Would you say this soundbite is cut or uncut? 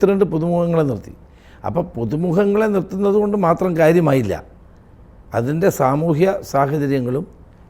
uncut